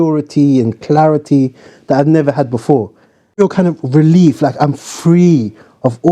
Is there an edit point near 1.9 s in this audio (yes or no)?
no